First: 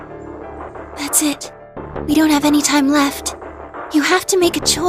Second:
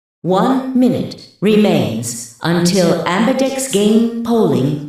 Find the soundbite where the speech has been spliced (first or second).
first